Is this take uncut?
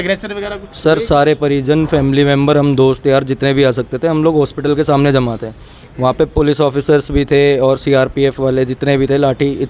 yes; 0 cuts

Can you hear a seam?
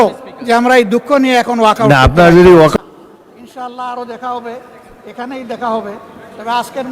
yes; 1 cut; at 2.7 s

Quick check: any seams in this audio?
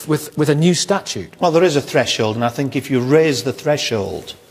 yes; 1 cut; at 2.1 s

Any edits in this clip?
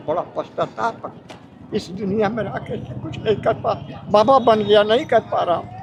no; 0 cuts

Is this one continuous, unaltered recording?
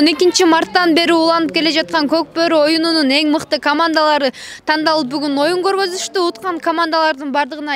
yes; 0 cuts

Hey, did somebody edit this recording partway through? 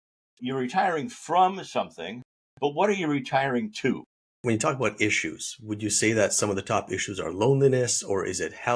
yes; 1 cut; at 4.4 s

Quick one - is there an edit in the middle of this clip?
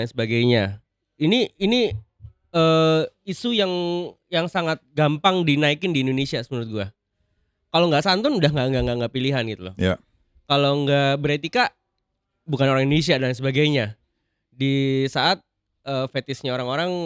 no; 0 cuts

